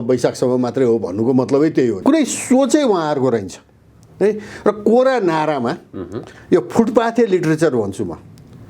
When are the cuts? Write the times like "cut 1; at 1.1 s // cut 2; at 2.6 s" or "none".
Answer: cut 1; at 2.0 s